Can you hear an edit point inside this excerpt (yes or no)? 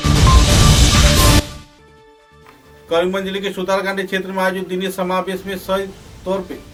no